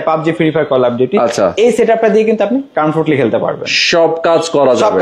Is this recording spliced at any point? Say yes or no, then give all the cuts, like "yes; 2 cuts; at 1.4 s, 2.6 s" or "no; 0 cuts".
no; 0 cuts